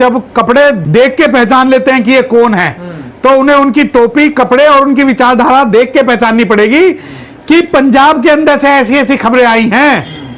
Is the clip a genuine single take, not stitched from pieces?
yes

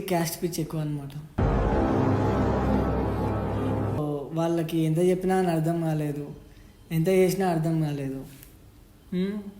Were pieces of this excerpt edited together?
no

